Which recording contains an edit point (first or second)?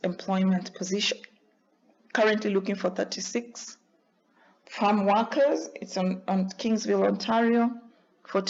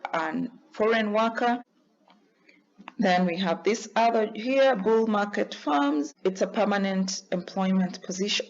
second